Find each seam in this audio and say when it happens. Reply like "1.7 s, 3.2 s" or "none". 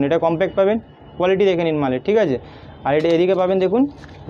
none